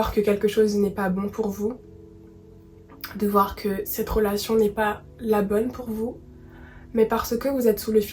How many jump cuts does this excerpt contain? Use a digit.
0